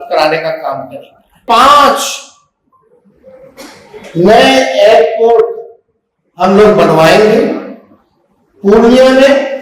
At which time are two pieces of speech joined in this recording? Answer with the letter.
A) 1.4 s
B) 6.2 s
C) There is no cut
A